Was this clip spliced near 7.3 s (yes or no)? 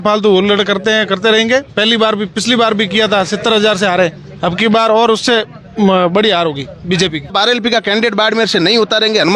yes